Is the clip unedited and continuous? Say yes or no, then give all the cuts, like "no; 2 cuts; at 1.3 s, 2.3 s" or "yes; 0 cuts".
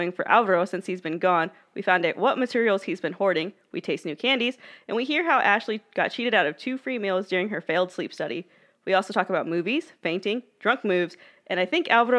yes; 0 cuts